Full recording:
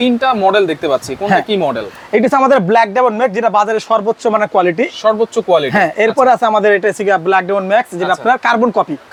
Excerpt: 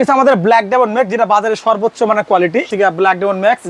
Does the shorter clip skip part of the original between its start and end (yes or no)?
yes